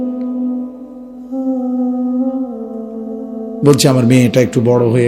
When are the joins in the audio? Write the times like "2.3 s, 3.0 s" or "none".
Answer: 3.2 s